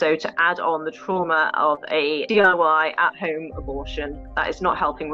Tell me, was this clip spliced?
yes; 2 cuts; at 2.2 s, 4.2 s

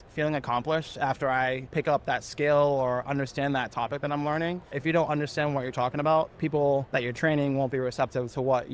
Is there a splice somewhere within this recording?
yes; 3 cuts; at 1.6 s, 4.7 s, 6.9 s

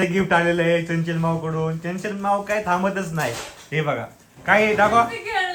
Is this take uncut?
yes; 0 cuts

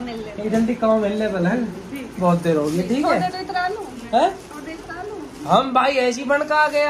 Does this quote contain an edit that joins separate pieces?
no; 0 cuts

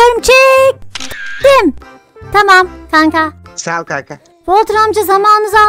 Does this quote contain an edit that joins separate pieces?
no; 0 cuts

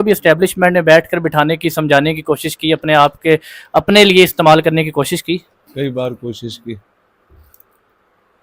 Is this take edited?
no; 0 cuts

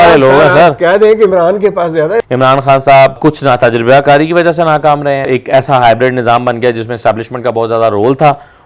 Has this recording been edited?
yes; 3 cuts; at 2.2 s, 3.2 s, 5.3 s

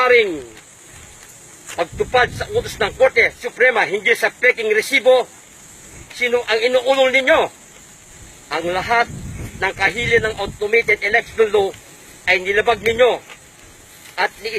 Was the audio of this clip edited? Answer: no; 0 cuts

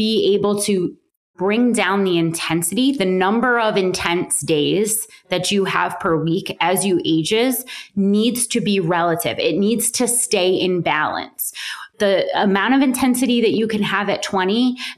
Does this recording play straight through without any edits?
yes; 0 cuts

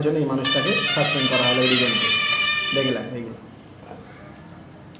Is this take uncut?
yes; 0 cuts

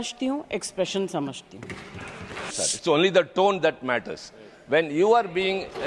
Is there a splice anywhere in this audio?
yes; 1 cut; at 2.6 s

